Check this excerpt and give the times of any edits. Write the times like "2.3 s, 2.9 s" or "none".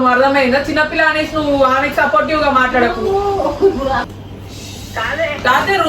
4.1 s